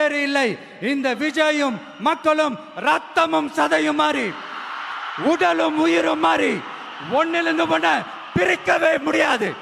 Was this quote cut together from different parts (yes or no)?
no